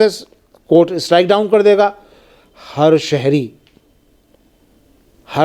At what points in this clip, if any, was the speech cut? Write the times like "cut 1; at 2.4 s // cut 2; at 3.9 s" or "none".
none